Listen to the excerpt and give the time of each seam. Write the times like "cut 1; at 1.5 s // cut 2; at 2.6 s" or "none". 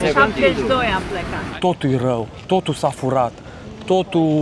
cut 1; at 1.4 s